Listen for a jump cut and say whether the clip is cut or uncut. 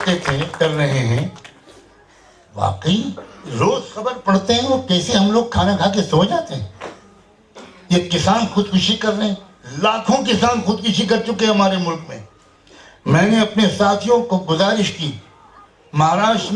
uncut